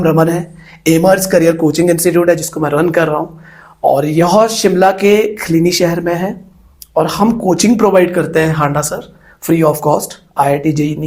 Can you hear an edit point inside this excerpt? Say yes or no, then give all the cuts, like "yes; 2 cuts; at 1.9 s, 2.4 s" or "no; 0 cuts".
no; 0 cuts